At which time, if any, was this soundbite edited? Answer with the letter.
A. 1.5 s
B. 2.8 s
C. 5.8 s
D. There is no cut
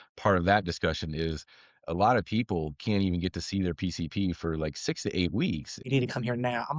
C